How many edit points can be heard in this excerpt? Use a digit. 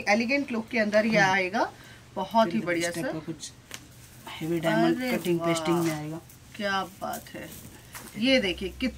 0